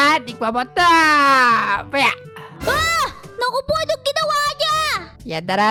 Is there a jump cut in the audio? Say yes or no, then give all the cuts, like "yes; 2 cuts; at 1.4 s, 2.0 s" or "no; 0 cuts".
no; 0 cuts